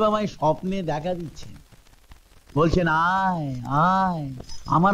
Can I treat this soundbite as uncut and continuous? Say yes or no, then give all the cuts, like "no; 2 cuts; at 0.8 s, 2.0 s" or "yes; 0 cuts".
yes; 0 cuts